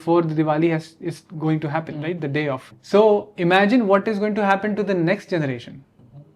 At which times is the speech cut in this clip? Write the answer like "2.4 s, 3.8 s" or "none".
2.7 s